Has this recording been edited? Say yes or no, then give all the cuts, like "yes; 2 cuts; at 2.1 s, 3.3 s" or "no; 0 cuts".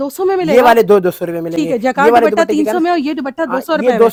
no; 0 cuts